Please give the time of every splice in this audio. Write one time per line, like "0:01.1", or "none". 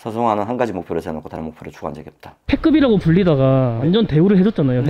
0:02.3